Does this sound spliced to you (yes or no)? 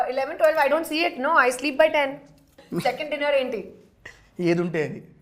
yes